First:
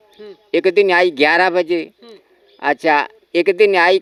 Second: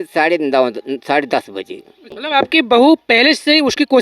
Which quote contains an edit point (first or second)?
second